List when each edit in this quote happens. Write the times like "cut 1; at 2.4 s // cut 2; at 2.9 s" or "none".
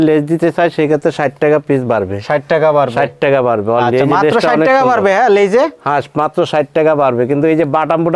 none